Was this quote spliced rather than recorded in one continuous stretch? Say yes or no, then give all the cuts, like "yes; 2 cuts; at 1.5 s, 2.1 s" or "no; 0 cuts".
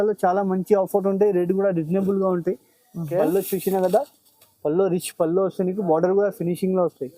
yes; 1 cut; at 3.1 s